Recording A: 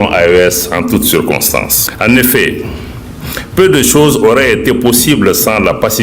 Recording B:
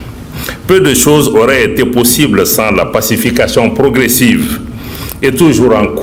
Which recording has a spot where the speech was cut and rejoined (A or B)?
A